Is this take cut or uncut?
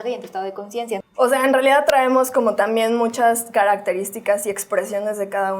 cut